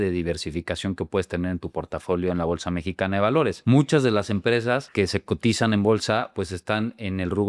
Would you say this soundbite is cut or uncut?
uncut